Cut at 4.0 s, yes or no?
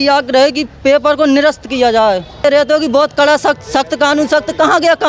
no